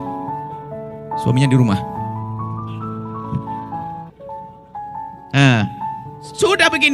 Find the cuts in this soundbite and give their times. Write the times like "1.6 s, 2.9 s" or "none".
none